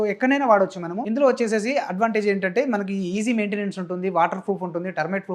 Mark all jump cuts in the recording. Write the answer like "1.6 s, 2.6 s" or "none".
0.9 s